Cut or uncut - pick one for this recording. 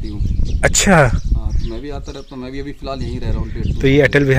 uncut